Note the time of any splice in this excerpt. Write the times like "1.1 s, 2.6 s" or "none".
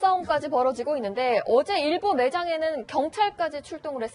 none